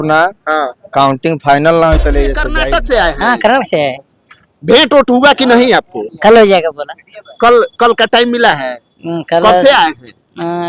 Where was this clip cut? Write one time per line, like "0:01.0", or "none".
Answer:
0:02.4